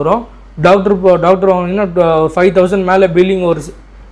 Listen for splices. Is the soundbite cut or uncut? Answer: uncut